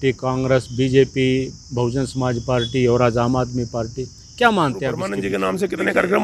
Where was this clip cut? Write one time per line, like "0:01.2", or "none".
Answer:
0:05.2